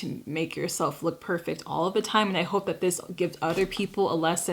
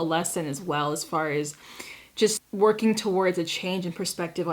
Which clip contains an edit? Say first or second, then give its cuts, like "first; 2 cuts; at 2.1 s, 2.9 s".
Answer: second; 1 cut; at 2.4 s